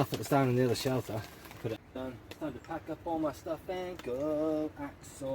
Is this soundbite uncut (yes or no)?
no